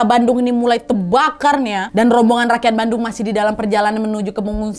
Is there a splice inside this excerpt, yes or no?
no